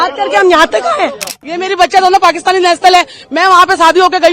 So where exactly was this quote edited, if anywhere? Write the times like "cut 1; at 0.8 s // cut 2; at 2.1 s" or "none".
cut 1; at 1.4 s

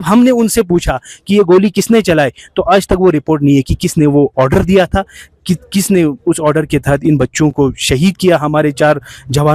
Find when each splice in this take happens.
none

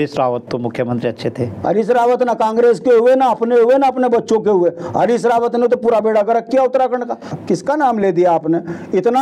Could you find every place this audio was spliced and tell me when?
cut 1; at 7.3 s

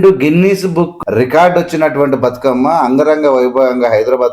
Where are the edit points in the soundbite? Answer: cut 1; at 1.0 s

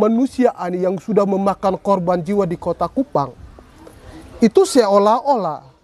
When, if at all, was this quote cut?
none

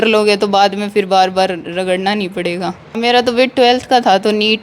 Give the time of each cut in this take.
cut 1; at 3.0 s

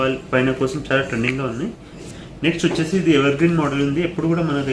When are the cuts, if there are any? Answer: cut 1; at 2.1 s

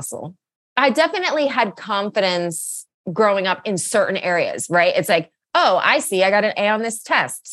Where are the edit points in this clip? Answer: none

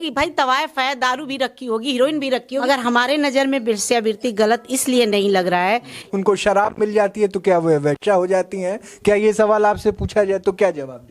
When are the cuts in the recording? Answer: cut 1; at 2.6 s // cut 2; at 6.0 s

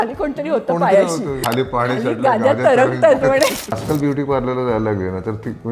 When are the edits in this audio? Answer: cut 1; at 1.4 s // cut 2; at 3.8 s

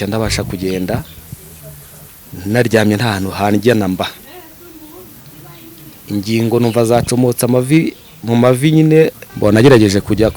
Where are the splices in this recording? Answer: cut 1; at 9.2 s

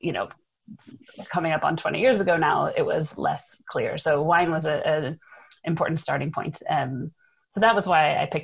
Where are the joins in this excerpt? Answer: none

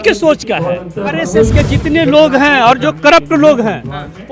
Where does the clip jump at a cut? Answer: cut 1; at 1.2 s

